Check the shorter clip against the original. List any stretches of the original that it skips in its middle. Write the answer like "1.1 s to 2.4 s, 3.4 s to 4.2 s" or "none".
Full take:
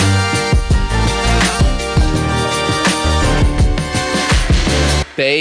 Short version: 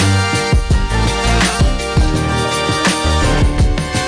none